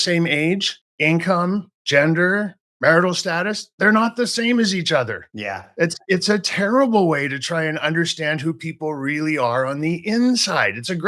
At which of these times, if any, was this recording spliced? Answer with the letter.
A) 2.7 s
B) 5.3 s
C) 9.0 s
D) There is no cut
D